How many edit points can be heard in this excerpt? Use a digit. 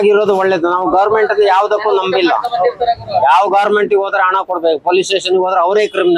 0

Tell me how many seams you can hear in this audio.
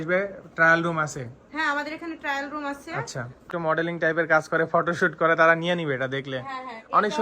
1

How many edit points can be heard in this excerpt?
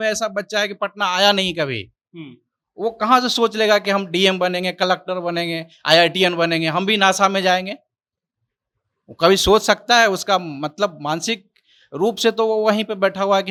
0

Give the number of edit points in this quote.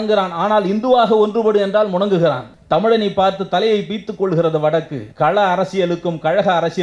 2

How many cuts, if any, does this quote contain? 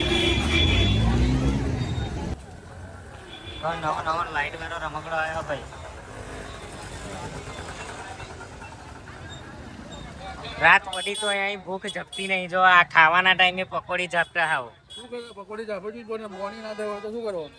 0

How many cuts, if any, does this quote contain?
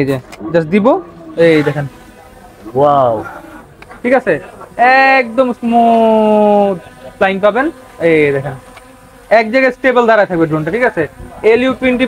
0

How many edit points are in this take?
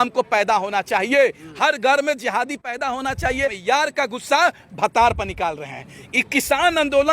1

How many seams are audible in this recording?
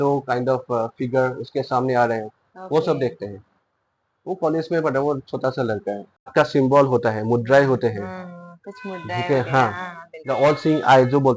1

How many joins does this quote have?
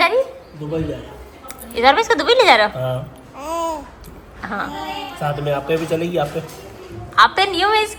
0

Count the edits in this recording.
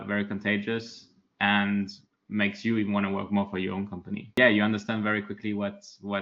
1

